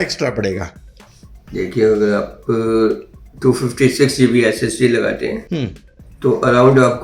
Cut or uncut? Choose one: uncut